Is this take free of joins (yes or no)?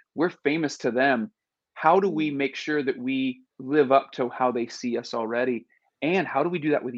no